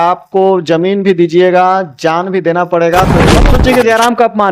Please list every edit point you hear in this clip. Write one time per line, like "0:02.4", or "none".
0:03.4